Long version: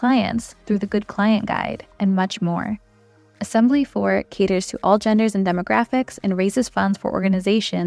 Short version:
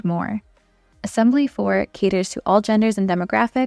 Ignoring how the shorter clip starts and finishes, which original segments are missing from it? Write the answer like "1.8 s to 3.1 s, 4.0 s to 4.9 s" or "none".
none